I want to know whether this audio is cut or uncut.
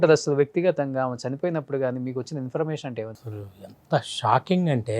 cut